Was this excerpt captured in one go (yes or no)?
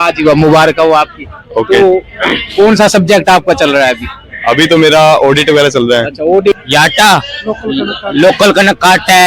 no